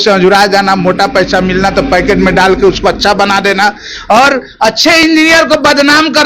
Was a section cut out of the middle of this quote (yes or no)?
no